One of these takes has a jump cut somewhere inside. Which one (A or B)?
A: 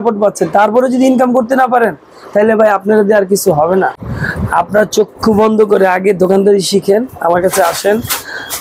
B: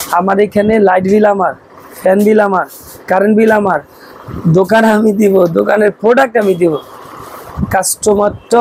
A